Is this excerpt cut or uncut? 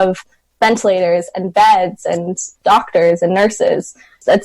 cut